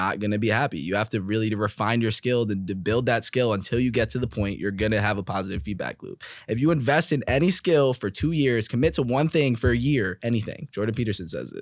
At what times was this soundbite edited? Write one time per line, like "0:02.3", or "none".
0:10.2